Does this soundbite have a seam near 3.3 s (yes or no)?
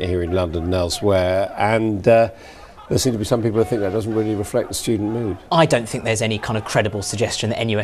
yes